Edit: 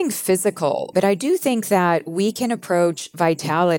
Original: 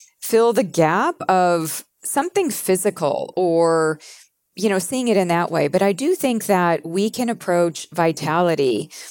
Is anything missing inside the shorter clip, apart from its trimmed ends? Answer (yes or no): yes